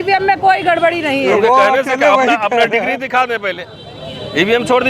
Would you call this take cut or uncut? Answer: uncut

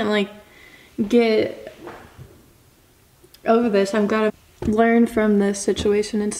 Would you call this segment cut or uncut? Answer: cut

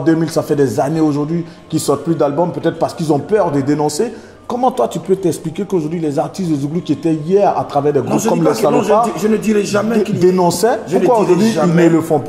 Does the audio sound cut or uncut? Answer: uncut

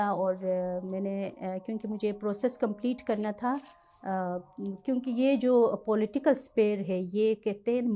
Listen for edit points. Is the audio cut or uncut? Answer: uncut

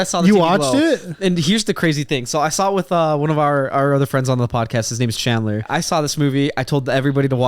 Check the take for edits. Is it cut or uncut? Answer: cut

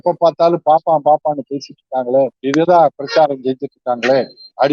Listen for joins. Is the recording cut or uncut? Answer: uncut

